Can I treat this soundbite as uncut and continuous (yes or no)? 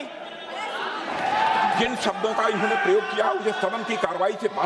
no